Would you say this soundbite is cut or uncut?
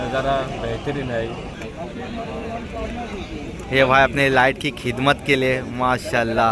cut